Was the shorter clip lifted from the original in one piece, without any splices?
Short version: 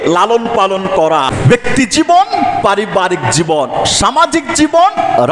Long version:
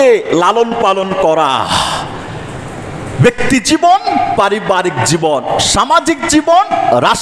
no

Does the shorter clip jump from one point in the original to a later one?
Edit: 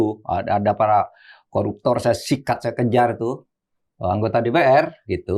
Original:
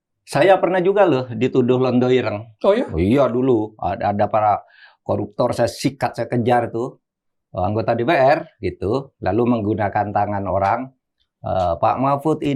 no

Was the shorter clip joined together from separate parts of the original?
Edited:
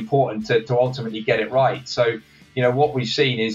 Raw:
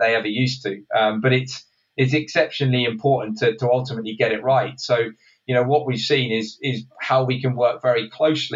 no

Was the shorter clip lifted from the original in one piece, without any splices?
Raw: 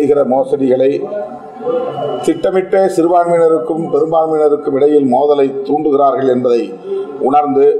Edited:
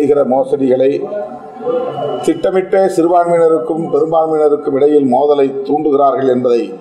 yes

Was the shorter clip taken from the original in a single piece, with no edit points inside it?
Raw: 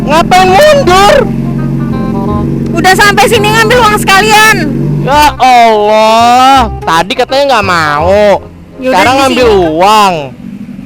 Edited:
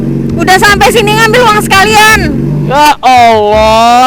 yes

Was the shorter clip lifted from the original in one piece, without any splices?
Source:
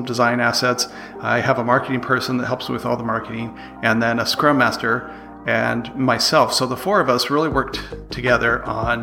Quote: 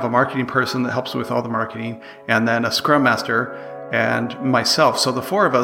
yes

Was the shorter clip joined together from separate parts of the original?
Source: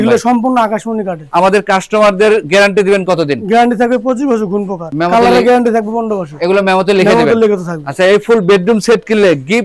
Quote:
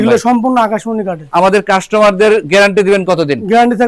no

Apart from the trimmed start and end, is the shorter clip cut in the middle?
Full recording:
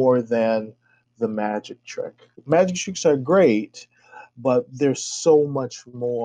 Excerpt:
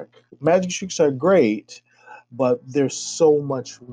no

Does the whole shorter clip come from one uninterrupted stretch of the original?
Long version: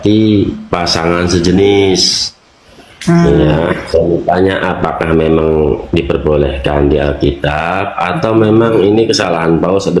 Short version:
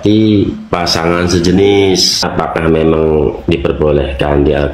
no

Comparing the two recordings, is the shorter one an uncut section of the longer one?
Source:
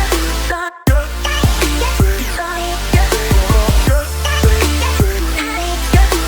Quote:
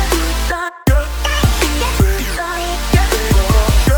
yes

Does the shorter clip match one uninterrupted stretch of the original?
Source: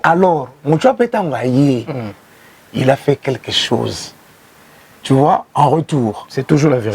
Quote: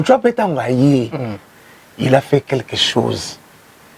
yes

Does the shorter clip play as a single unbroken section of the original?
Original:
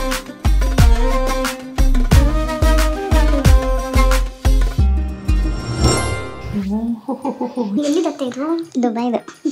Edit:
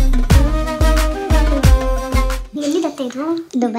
no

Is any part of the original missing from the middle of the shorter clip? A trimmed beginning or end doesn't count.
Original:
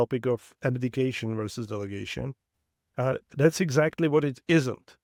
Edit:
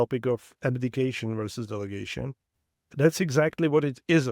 yes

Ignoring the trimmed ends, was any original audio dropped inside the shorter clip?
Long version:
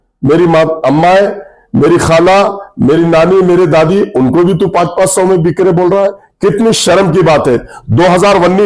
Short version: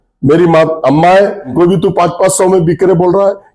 yes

